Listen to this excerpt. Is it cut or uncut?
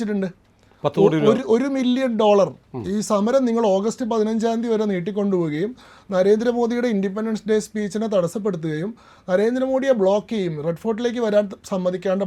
uncut